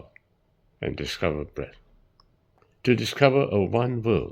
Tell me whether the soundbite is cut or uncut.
cut